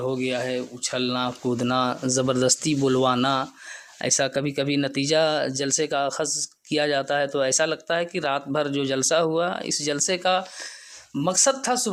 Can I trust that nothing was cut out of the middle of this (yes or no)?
yes